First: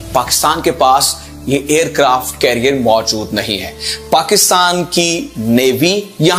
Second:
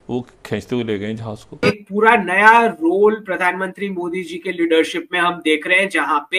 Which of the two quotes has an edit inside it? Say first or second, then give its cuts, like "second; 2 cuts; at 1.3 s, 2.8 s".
second; 1 cut; at 1.5 s